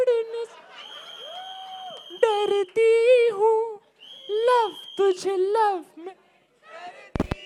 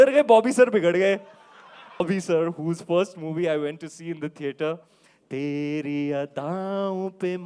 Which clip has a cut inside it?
second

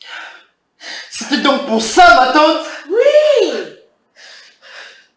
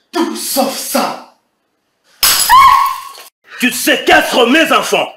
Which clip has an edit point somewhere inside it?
second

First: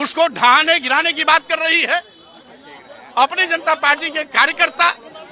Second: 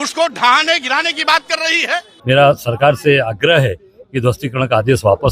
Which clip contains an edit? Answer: second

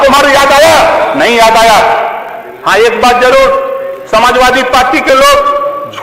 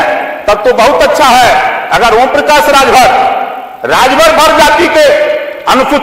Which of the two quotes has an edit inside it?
first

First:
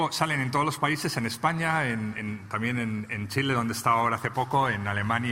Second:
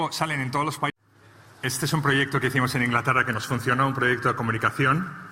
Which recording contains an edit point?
first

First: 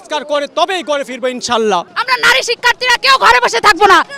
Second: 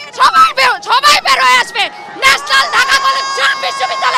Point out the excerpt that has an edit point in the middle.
first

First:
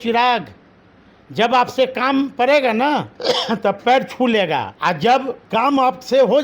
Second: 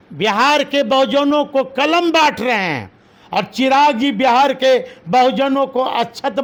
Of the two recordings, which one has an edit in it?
first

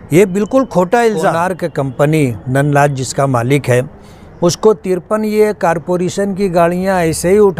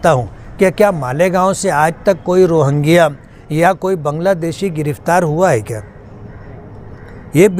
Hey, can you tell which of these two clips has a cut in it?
first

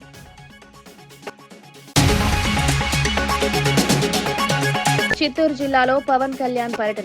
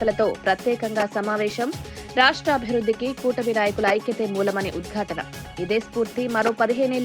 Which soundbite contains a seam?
first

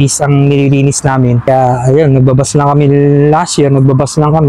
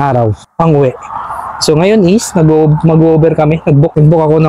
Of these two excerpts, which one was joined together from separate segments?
first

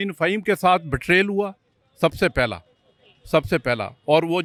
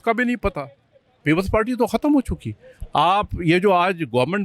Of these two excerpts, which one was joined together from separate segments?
second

